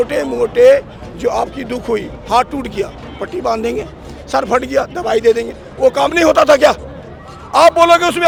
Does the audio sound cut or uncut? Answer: uncut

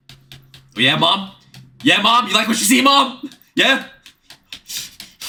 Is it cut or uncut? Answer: uncut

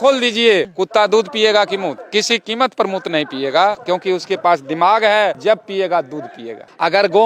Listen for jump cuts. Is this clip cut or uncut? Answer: uncut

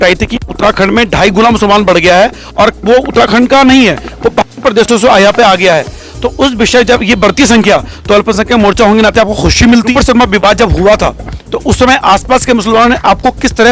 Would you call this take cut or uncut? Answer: cut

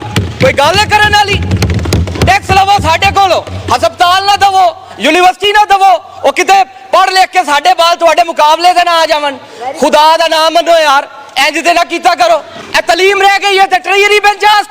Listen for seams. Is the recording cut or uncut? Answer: cut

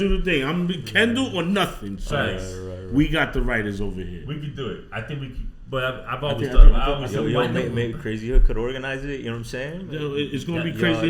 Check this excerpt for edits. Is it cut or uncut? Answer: uncut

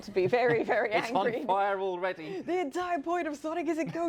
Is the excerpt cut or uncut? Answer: uncut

